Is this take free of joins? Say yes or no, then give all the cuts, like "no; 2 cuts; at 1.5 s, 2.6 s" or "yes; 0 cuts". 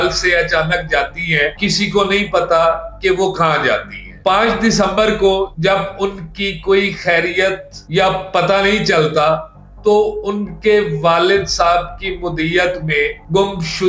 yes; 0 cuts